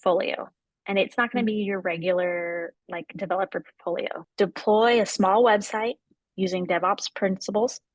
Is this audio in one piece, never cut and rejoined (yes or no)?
no